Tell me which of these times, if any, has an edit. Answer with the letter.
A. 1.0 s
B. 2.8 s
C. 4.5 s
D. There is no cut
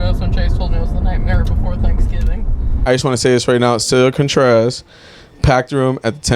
B